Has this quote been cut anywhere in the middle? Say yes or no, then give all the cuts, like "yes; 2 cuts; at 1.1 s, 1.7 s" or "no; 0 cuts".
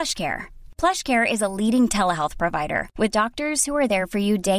no; 0 cuts